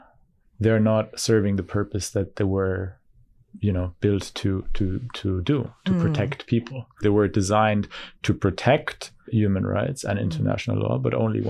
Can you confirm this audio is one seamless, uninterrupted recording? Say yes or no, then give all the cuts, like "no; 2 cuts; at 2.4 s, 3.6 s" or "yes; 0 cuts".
no; 2 cuts; at 7.0 s, 9.3 s